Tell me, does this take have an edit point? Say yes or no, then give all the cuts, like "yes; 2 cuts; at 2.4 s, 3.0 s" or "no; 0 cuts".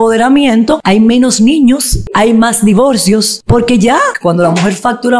yes; 4 cuts; at 0.8 s, 2.1 s, 3.4 s, 4.1 s